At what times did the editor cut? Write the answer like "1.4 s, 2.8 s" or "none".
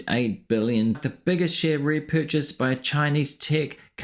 1.0 s